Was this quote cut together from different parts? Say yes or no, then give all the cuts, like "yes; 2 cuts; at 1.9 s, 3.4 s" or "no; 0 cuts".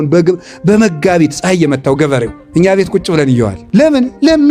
yes; 2 cuts; at 2.4 s, 3.6 s